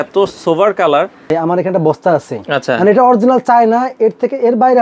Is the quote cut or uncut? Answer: cut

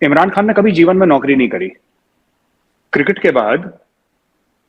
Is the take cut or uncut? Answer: uncut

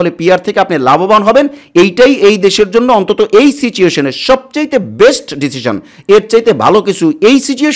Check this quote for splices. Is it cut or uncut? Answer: uncut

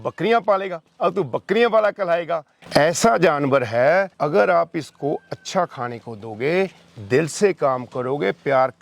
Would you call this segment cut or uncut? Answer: cut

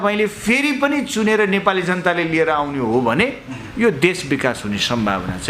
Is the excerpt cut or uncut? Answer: uncut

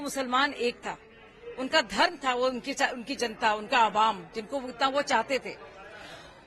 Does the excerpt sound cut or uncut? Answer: uncut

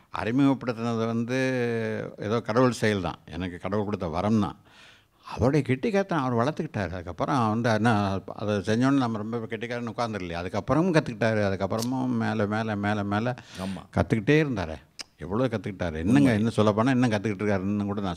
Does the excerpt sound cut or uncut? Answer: uncut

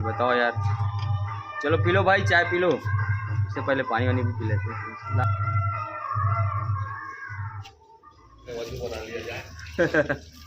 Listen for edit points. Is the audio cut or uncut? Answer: uncut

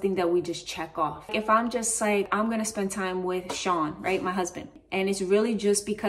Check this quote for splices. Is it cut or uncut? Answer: cut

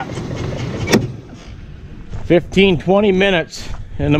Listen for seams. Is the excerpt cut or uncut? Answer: uncut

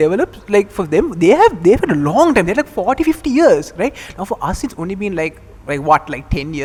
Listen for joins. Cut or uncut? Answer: uncut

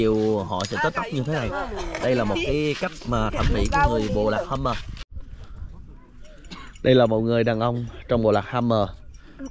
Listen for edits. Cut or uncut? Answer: cut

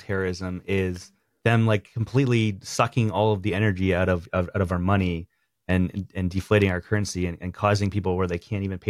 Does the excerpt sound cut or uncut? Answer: uncut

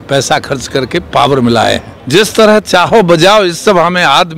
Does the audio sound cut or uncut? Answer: cut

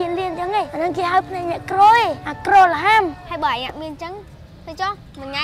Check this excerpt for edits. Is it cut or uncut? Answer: cut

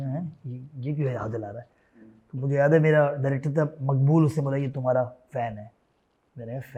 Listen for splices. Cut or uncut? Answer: uncut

